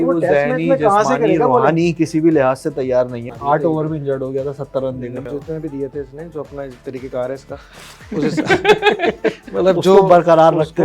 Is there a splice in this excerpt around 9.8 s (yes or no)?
no